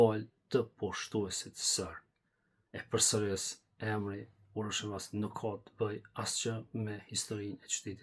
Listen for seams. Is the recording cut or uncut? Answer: uncut